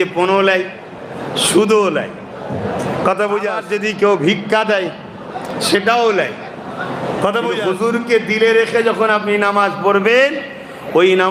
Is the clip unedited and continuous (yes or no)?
no